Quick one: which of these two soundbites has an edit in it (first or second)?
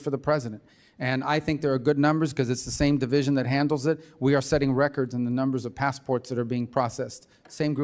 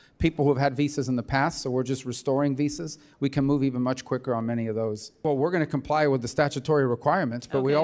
second